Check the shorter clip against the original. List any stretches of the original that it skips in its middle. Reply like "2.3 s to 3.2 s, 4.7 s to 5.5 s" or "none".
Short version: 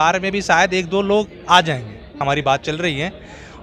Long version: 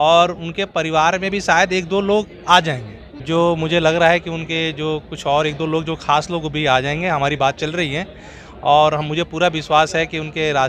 3.2 s to 7.2 s

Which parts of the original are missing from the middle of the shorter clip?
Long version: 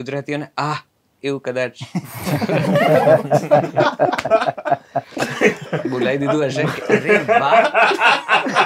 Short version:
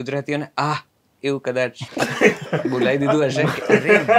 1.9 s to 5.1 s

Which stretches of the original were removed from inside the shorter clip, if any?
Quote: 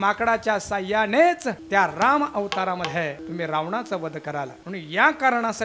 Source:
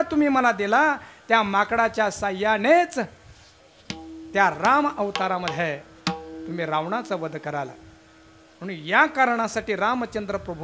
3.1 s to 4.2 s, 5.8 s to 6.4 s, 7.8 s to 8.5 s

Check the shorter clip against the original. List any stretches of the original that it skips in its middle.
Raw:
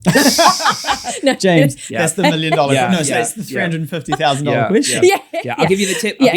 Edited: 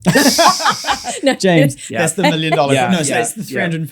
none

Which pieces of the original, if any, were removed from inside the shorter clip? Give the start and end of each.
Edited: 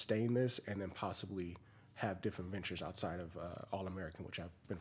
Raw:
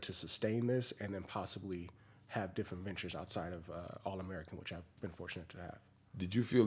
none

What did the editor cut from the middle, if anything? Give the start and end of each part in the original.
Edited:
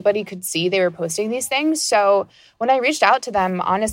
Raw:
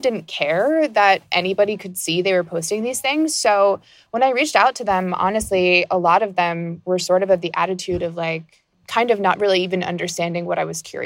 none

